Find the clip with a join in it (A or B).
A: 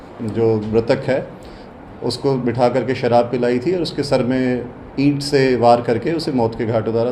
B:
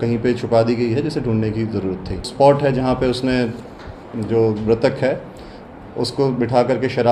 B